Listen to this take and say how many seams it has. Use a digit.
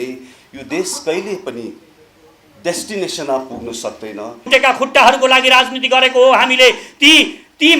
1